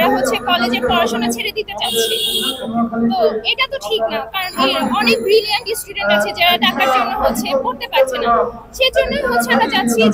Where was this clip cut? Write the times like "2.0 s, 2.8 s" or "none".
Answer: none